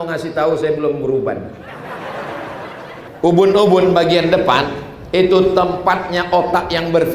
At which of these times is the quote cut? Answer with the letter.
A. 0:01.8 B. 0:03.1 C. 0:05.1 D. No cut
B